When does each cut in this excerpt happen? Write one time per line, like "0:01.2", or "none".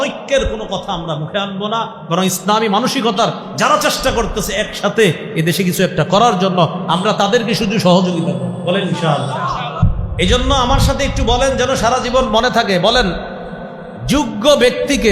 0:09.8